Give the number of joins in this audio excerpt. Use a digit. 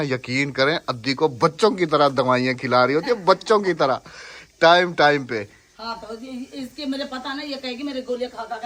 0